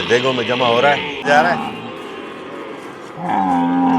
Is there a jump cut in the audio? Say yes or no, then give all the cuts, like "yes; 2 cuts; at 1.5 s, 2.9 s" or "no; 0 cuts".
yes; 1 cut; at 1.3 s